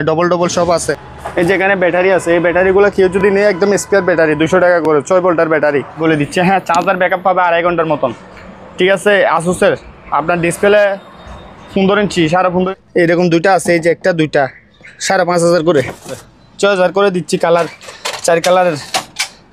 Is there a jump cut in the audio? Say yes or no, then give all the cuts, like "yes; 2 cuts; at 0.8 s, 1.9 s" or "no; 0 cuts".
yes; 4 cuts; at 1.0 s, 5.9 s, 12.7 s, 16.2 s